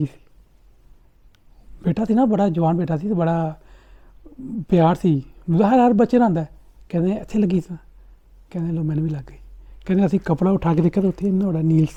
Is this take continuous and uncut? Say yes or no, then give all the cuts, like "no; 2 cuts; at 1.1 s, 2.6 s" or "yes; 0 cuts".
yes; 0 cuts